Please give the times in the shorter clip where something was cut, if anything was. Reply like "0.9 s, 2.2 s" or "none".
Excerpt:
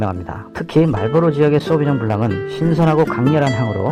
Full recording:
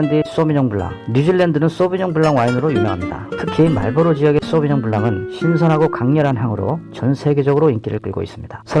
none